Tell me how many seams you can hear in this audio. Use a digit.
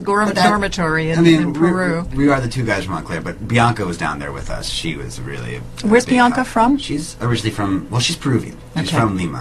1